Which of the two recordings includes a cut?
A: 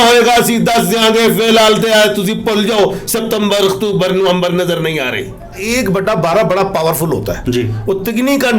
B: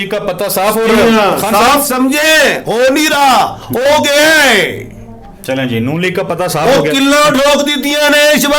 A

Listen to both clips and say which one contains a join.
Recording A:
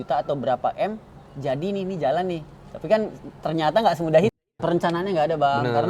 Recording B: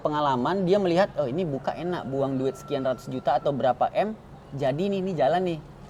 A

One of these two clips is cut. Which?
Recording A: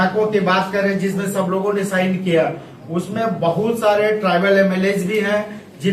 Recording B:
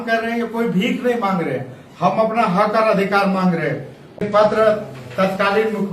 B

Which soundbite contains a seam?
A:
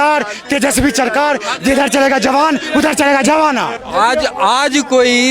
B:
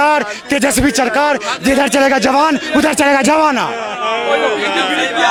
A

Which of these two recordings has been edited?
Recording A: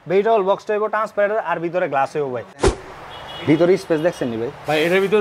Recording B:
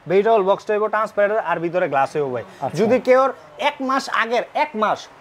A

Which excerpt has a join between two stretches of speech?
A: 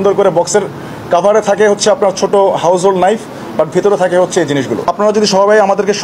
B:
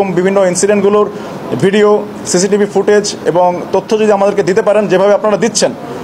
A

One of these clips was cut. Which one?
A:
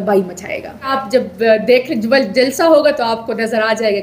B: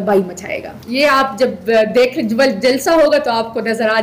A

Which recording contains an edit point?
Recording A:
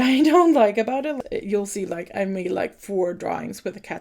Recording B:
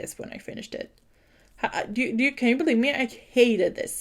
A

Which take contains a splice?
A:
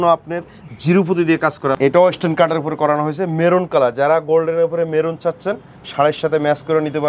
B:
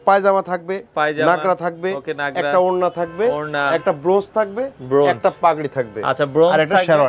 A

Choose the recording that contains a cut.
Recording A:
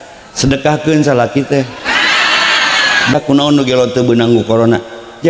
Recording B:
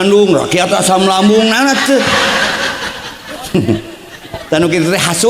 A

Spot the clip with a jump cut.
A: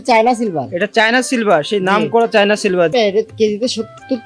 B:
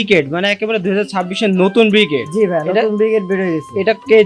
A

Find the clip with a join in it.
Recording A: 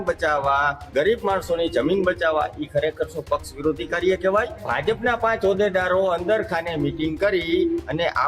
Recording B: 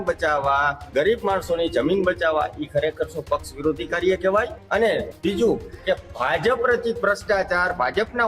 A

